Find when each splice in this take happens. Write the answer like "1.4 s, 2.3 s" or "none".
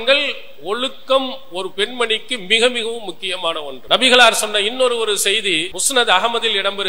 3.7 s, 5.8 s